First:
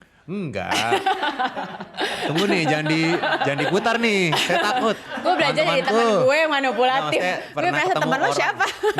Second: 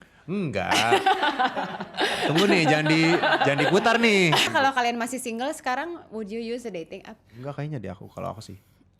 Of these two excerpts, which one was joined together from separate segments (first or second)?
second